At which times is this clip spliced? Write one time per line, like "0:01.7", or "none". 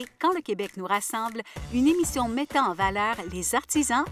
none